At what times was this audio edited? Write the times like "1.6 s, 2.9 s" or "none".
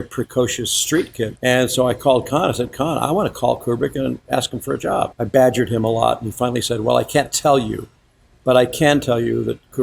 1.3 s, 5.1 s